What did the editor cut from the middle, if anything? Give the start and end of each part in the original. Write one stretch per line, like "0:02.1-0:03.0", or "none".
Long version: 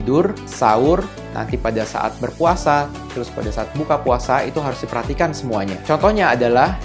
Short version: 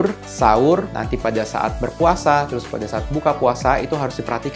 0:01.2-0:01.4
0:03.0-0:03.2